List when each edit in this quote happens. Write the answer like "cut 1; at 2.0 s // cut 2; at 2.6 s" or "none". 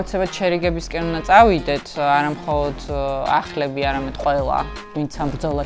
none